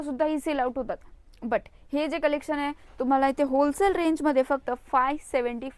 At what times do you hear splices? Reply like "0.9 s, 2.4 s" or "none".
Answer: none